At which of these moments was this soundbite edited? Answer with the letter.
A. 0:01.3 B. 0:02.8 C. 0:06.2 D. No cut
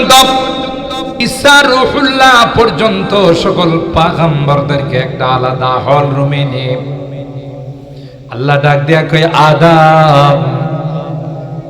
A